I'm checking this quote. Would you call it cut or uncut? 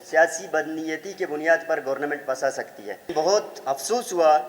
cut